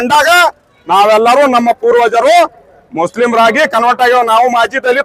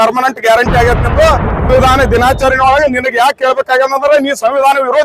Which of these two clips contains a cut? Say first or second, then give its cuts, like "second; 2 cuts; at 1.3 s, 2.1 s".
second; 1 cut; at 1.7 s